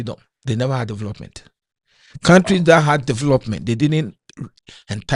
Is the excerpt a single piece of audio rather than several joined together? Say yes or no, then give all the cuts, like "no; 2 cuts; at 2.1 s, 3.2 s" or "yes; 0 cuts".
yes; 0 cuts